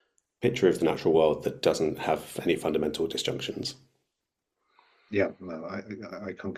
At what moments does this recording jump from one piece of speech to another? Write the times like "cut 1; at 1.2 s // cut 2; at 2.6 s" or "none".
none